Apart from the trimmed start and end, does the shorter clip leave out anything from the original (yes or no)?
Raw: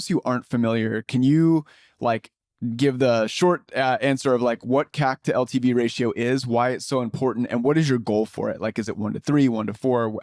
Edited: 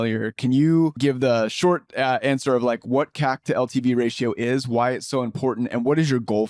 yes